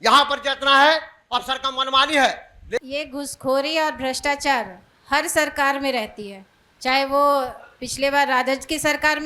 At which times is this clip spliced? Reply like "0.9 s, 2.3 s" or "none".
2.8 s